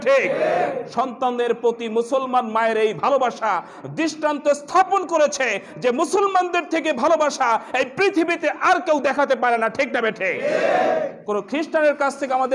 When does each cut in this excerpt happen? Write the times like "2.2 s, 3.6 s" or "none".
11.1 s